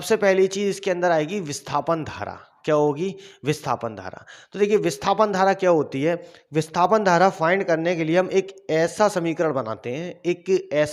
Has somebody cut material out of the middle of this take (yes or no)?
no